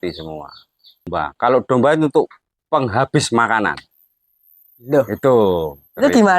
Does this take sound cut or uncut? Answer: cut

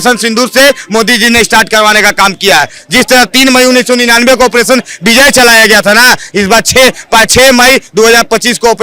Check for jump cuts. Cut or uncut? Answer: uncut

